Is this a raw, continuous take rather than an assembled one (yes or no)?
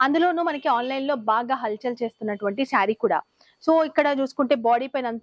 yes